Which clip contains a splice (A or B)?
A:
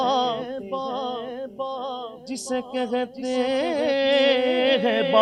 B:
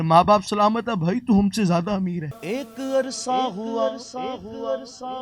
B